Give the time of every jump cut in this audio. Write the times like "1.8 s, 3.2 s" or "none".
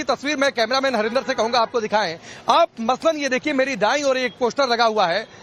1.5 s